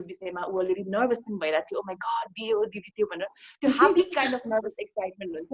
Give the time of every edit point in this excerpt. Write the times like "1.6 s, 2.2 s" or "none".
none